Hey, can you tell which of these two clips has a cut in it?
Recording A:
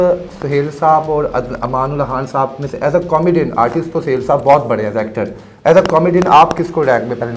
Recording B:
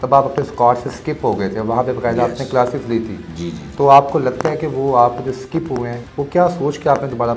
B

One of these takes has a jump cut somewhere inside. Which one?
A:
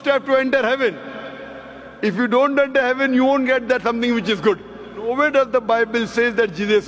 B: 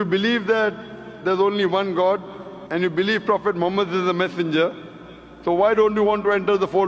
A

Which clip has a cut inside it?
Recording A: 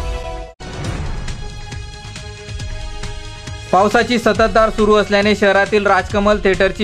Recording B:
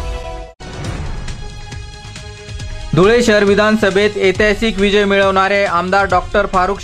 B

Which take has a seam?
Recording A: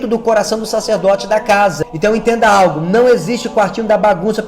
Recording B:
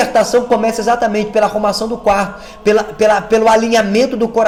A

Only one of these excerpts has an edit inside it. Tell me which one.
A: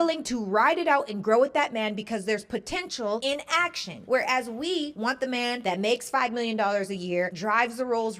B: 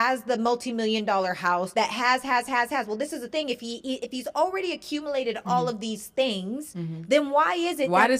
A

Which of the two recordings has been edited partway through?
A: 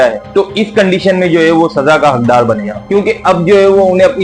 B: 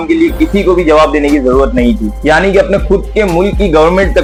A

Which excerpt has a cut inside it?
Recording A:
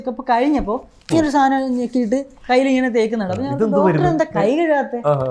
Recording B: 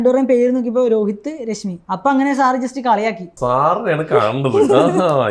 B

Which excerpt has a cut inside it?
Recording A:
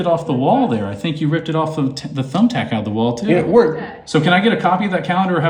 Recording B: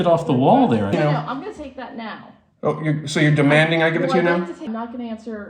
B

